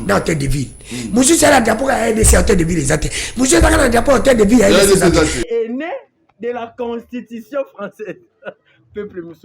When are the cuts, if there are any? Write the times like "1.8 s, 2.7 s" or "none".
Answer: 5.4 s